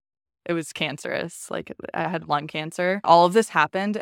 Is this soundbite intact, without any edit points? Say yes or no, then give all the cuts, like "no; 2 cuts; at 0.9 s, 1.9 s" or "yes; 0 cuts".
no; 1 cut; at 3.0 s